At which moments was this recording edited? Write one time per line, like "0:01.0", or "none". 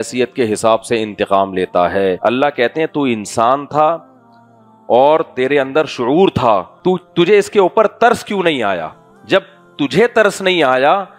0:02.2
0:06.7